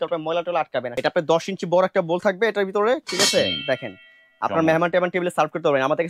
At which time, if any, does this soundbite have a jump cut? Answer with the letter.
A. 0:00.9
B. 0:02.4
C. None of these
A